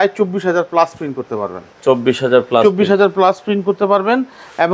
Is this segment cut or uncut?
uncut